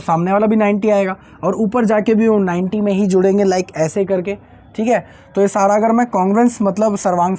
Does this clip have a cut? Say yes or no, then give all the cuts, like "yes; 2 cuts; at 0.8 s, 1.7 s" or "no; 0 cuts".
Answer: no; 0 cuts